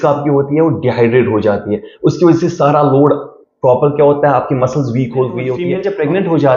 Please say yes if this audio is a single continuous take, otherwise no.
no